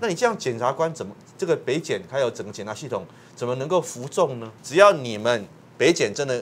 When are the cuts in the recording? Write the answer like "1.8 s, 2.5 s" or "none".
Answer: 4.5 s